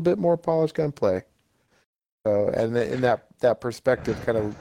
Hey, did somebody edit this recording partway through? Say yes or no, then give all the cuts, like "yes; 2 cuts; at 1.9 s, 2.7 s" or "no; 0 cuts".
no; 0 cuts